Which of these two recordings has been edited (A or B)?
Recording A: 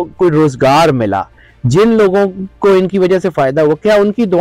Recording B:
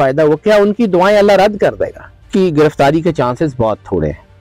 B